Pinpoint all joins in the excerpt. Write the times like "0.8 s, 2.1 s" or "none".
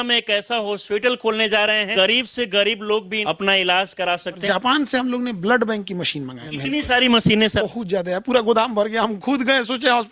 1.9 s, 3.1 s, 4.4 s, 6.4 s, 7.6 s